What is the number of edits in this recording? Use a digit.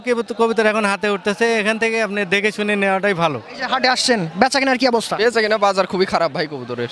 1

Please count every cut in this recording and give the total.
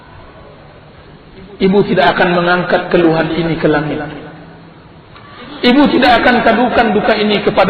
1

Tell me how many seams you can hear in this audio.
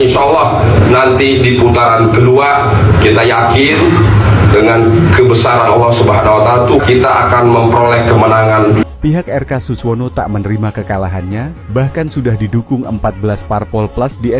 2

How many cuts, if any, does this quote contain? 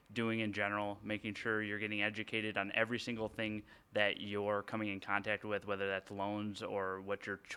0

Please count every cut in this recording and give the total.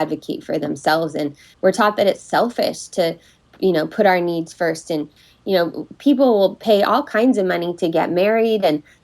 1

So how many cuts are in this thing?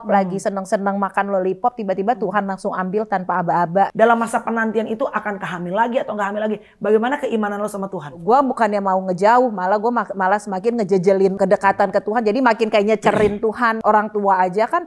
4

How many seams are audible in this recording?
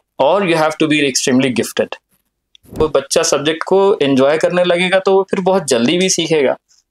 1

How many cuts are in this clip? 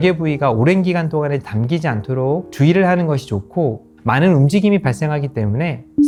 0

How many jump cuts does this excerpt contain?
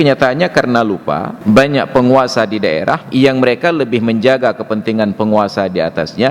2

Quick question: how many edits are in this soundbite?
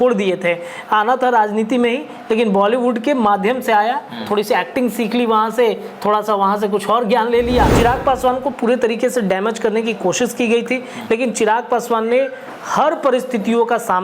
1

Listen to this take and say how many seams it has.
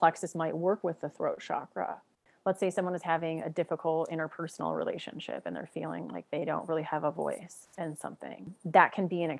2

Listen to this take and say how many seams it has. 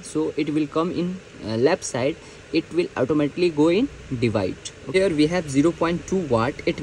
1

